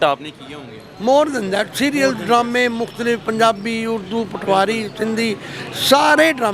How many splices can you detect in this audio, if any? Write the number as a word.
zero